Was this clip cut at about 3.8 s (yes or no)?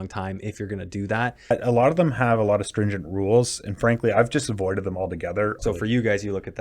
no